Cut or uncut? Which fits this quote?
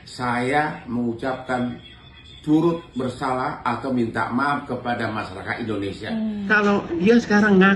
cut